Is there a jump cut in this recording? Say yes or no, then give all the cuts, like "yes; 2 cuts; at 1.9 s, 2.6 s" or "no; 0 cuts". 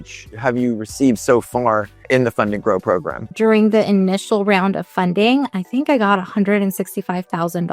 yes; 2 cuts; at 2.1 s, 3.3 s